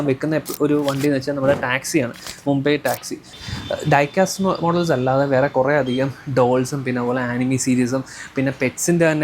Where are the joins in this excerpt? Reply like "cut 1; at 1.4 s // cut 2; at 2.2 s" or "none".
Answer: cut 1; at 3.4 s

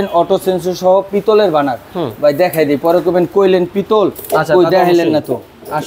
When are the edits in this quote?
none

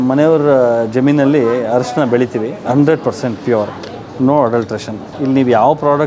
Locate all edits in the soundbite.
cut 1; at 2.6 s

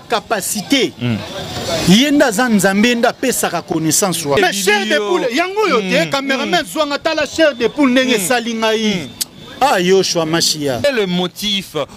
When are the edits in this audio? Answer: cut 1; at 4.4 s // cut 2; at 10.8 s

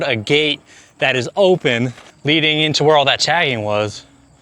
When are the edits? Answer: cut 1; at 2.1 s

